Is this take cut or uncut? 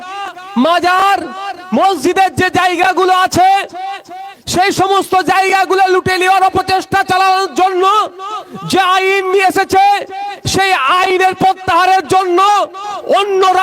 uncut